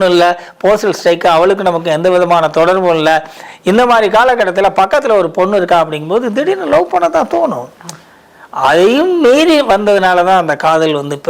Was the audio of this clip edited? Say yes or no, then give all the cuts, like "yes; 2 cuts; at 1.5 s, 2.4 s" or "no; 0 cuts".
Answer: no; 0 cuts